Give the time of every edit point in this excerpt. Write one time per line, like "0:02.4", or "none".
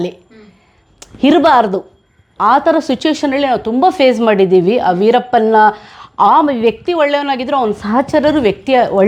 none